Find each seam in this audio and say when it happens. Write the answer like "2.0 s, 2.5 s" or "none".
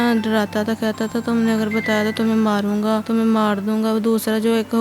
3.0 s